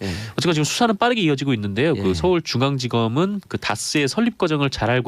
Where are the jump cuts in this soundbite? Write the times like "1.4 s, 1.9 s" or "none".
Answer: 1.3 s